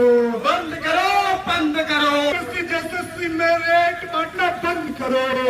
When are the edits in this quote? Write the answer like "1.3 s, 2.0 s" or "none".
2.3 s

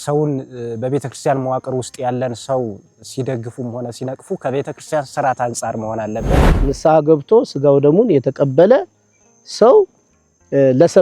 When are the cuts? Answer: 6.7 s

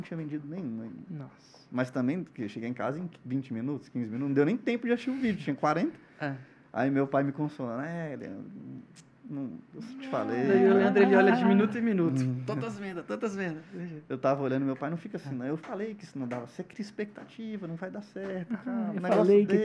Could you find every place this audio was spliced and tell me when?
none

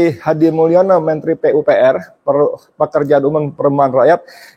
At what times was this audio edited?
none

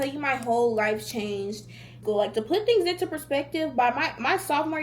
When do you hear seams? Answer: 1.9 s

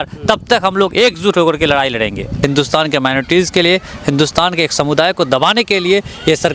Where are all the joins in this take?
2.3 s

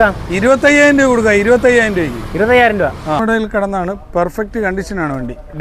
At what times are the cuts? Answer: 3.2 s

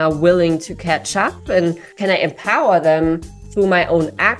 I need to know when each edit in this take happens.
1.9 s

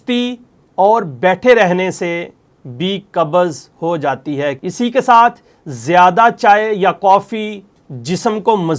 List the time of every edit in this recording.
4.6 s

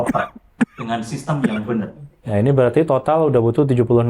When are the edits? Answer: 2.1 s

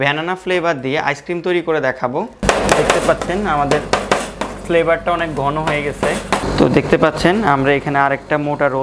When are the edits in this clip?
2.3 s, 6.4 s

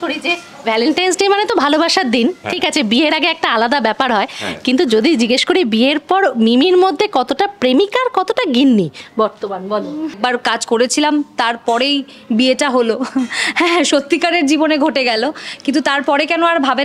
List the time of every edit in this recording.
10.2 s

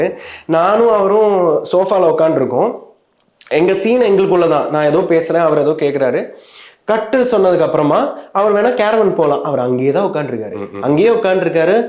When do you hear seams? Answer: none

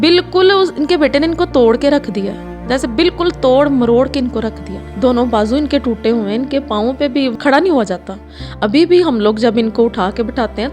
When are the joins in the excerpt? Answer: 7.3 s

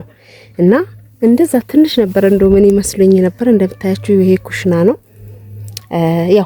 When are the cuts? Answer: none

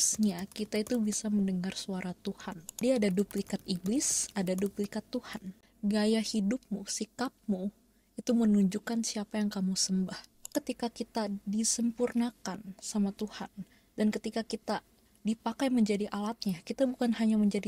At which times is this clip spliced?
2.8 s, 10.5 s

